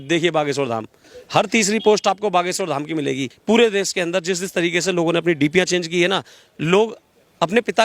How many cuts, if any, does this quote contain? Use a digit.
1